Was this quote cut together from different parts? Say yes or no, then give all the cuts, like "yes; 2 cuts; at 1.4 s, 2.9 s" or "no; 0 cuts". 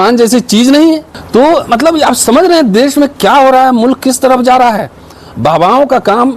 yes; 1 cut; at 1.1 s